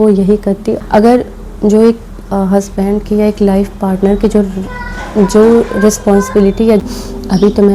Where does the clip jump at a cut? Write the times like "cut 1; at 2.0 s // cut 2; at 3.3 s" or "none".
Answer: cut 1; at 0.8 s // cut 2; at 6.8 s